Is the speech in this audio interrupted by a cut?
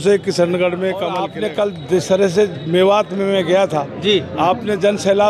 yes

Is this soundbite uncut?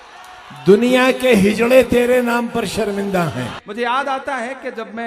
no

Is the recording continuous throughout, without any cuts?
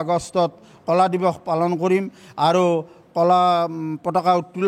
yes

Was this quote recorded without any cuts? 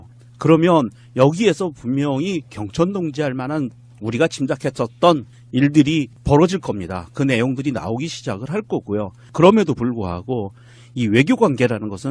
no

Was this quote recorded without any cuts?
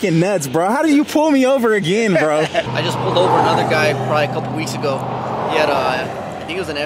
no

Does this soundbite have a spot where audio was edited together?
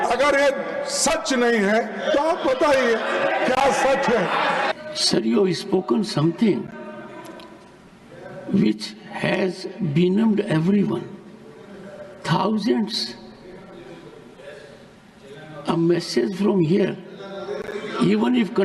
yes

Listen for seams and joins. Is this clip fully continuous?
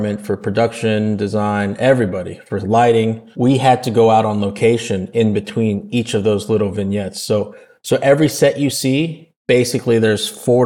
yes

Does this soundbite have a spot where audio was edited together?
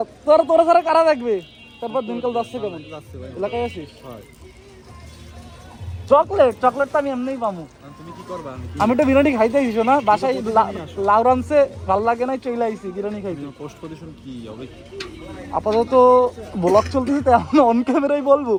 no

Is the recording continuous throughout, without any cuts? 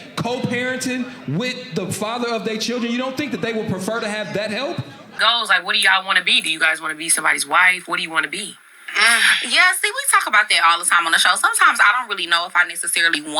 no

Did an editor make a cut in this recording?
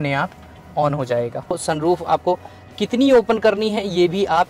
yes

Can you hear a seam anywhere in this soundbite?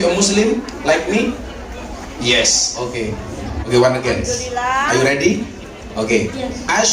yes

